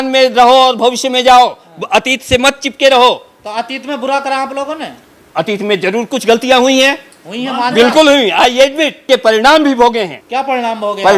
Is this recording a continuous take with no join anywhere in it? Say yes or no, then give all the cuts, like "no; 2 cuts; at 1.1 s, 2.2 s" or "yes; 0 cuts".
no; 2 cuts; at 9.0 s, 10.2 s